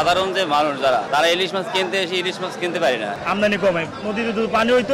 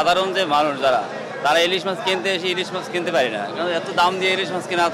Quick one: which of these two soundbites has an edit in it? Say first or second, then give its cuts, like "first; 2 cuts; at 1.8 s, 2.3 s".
first; 2 cuts; at 1.1 s, 3.1 s